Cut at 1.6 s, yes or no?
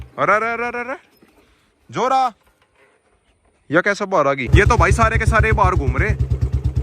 no